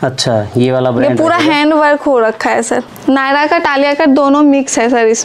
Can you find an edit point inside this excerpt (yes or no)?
yes